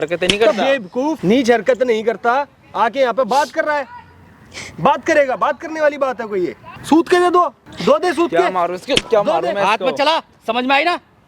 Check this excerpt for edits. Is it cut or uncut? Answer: cut